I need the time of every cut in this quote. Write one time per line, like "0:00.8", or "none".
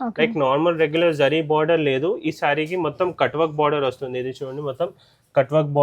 none